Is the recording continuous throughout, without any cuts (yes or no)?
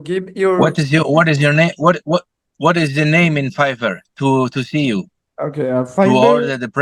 yes